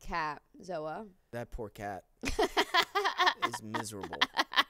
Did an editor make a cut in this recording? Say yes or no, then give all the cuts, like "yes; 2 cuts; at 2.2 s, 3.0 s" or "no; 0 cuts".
yes; 1 cut; at 1.3 s